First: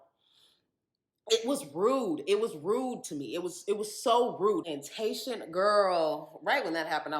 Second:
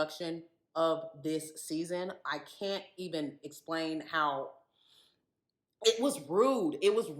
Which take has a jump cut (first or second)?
first